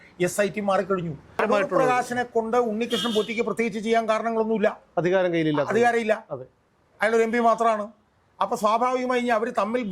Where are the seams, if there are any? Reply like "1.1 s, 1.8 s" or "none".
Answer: 1.4 s